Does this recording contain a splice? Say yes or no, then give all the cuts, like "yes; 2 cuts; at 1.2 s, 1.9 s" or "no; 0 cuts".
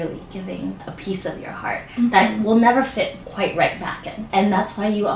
yes; 3 cuts; at 0.8 s, 3.2 s, 4.3 s